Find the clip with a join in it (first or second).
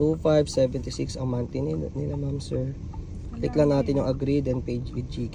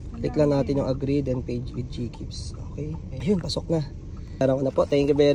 second